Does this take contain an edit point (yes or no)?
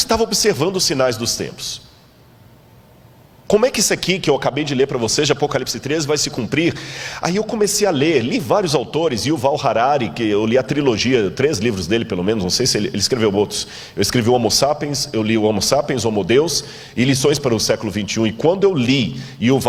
no